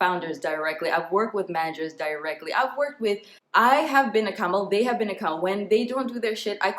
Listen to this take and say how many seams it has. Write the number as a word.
one